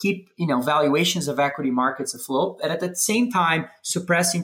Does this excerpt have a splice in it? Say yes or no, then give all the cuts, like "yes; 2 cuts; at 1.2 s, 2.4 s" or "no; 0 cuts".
no; 0 cuts